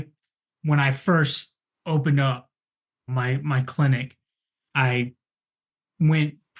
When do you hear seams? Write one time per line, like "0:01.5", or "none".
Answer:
none